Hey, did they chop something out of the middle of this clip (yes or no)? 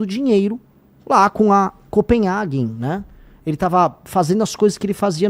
no